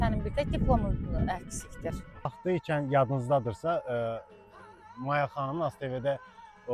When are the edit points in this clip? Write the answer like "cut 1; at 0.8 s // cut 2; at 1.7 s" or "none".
cut 1; at 2.4 s